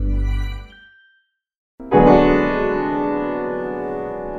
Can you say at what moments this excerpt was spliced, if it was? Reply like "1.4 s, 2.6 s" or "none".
1.8 s